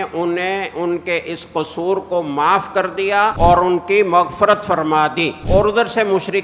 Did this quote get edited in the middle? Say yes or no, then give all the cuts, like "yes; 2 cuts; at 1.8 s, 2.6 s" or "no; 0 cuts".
yes; 2 cuts; at 3.3 s, 5.4 s